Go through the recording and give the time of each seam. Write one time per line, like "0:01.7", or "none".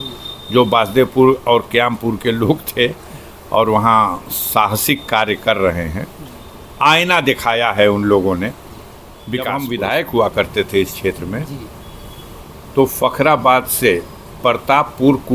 0:09.5